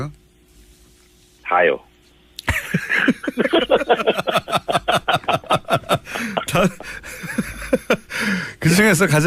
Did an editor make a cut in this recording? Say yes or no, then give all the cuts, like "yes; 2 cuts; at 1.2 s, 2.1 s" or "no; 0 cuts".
no; 0 cuts